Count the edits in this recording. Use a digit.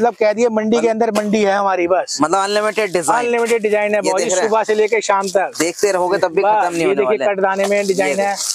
0